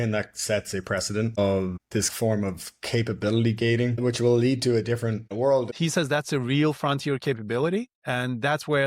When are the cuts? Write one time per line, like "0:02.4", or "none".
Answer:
0:02.1
0:03.9
0:05.7